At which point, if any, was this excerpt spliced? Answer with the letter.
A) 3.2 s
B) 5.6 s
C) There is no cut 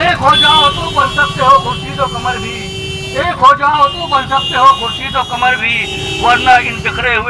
C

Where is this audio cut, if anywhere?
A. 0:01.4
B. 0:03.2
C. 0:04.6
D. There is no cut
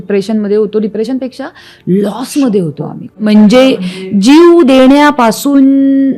B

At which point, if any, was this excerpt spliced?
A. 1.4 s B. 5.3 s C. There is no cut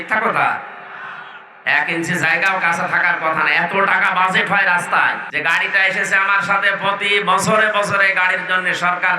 B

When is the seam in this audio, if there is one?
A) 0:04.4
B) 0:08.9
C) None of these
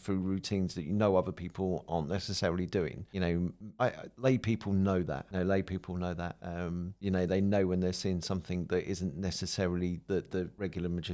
C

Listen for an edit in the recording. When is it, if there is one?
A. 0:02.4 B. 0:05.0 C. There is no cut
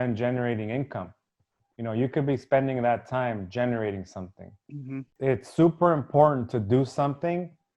B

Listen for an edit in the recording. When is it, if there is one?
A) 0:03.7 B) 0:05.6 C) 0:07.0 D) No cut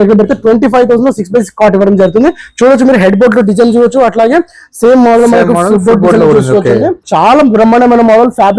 C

